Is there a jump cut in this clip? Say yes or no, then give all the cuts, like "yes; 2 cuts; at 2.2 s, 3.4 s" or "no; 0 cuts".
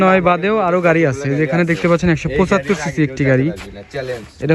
no; 0 cuts